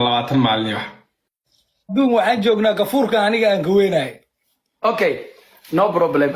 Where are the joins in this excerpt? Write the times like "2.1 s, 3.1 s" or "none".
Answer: 1.9 s